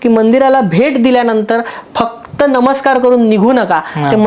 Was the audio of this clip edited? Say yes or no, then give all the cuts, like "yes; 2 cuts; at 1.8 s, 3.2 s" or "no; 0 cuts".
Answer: no; 0 cuts